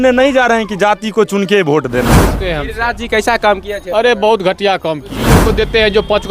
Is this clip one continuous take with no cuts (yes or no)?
no